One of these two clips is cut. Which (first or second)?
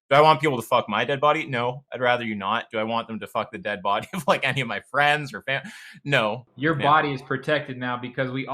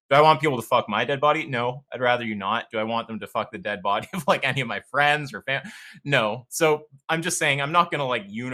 first